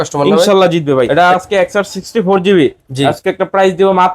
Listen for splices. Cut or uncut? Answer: cut